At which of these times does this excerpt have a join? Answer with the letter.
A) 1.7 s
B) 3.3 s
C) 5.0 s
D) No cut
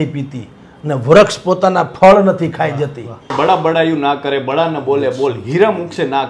B